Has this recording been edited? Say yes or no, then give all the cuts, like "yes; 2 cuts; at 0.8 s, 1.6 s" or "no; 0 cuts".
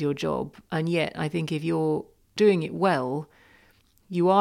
yes; 1 cut; at 2.4 s